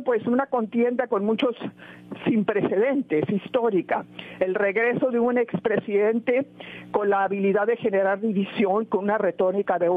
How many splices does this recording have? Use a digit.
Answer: 0